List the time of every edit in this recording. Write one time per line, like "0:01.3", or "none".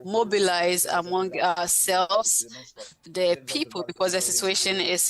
0:02.7